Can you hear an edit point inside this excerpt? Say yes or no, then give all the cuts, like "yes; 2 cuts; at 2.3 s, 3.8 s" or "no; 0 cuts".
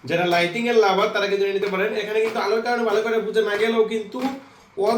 no; 0 cuts